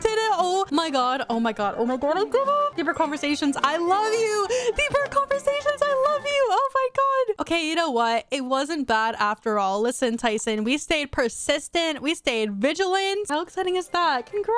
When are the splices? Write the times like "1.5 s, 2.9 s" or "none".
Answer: 13.3 s